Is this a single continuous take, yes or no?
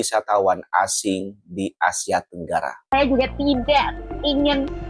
no